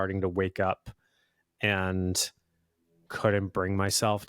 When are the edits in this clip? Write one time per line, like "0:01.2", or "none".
0:03.0